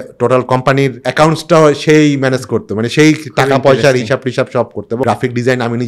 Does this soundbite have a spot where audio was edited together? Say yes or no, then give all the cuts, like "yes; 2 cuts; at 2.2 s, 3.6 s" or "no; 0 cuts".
yes; 2 cuts; at 1.0 s, 5.0 s